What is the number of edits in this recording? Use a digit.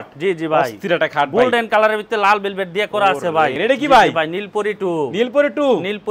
1